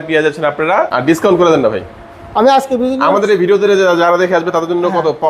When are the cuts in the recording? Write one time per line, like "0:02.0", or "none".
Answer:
0:00.9